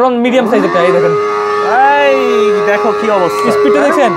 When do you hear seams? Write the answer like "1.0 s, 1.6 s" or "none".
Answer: none